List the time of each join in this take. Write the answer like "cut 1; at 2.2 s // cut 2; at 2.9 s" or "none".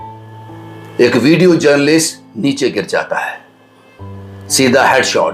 cut 1; at 0.9 s